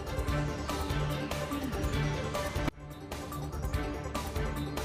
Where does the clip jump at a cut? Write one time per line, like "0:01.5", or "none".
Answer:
none